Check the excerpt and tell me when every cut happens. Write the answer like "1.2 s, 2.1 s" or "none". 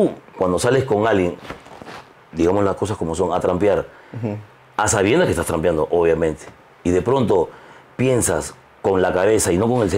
none